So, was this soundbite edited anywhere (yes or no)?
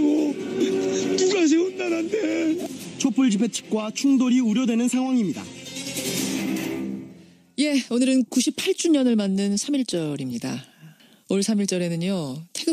no